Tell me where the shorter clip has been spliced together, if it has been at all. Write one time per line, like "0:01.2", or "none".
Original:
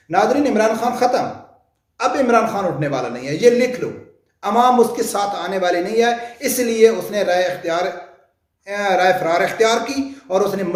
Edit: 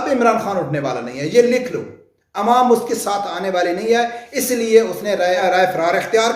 0:05.4